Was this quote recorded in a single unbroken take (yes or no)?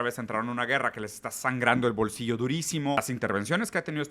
no